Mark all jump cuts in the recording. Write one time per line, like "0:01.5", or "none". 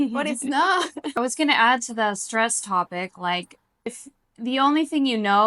0:01.2